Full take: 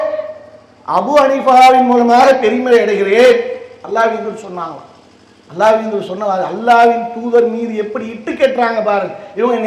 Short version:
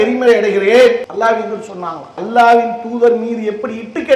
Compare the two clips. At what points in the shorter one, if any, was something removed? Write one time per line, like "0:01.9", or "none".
0:01.1
0:02.2